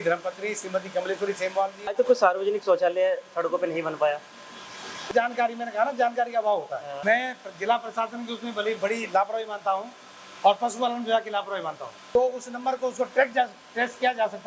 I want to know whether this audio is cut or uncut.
cut